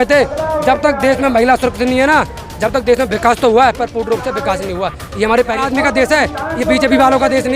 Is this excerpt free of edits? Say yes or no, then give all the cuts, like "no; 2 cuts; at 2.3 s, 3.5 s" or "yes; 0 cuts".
no; 1 cut; at 5.6 s